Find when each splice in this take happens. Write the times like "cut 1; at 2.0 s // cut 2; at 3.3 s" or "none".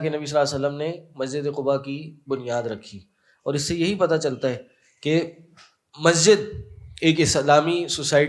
none